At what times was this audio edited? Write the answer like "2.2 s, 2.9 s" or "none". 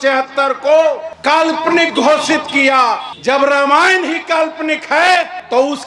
none